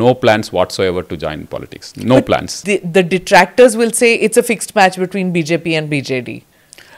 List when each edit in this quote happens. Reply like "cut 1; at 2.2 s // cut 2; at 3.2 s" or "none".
cut 1; at 2.5 s